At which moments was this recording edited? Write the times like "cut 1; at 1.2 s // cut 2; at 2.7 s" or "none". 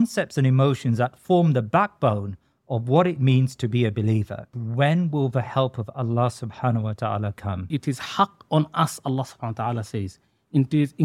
cut 1; at 4.5 s // cut 2; at 7.7 s

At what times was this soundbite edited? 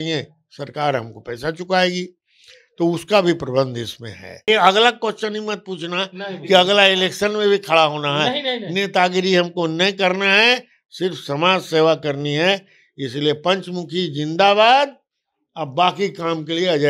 cut 1; at 4.5 s

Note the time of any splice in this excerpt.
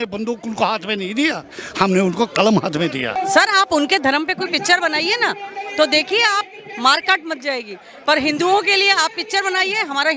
cut 1; at 3.2 s

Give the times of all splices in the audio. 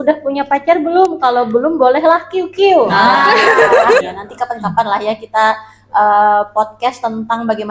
cut 1; at 4.0 s

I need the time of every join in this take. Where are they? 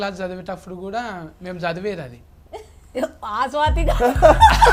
none

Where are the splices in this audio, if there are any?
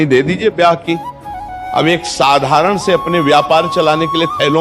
cut 1; at 1.5 s

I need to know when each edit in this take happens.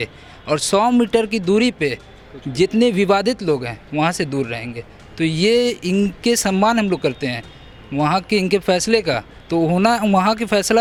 none

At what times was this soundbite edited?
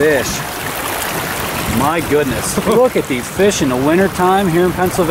none

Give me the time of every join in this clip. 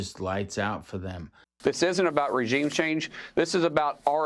cut 1; at 1.6 s

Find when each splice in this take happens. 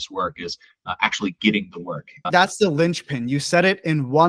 cut 1; at 2.3 s

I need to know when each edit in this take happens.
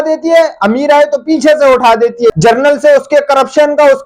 cut 1; at 2.3 s

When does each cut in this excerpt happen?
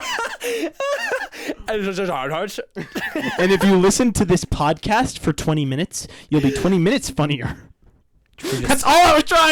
none

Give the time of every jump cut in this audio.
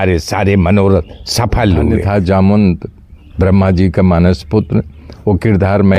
cut 1; at 2.0 s

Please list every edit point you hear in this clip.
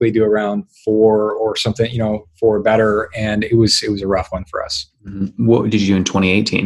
none

